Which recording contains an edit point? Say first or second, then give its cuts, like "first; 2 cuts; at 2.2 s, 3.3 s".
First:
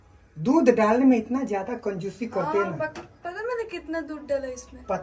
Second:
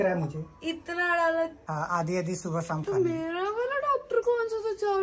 second; 1 cut; at 1.6 s